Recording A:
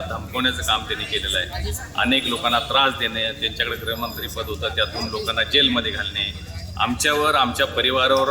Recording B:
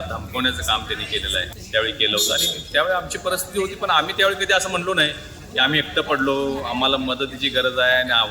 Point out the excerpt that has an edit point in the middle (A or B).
B